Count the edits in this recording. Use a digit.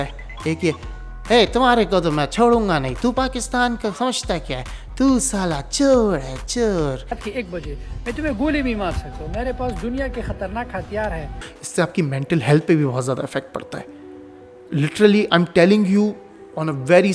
1